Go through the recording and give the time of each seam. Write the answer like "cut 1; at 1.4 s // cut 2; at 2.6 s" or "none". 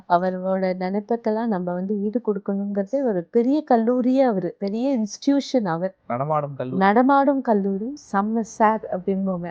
cut 1; at 3.2 s // cut 2; at 4.6 s // cut 3; at 8.0 s

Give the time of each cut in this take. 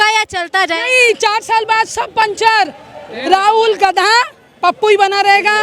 none

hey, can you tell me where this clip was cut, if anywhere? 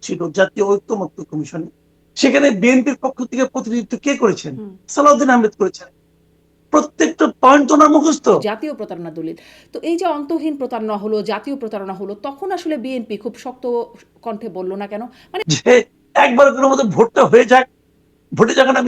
cut 1; at 8.5 s // cut 2; at 15.4 s

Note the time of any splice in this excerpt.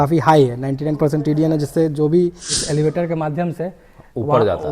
cut 1; at 2.5 s

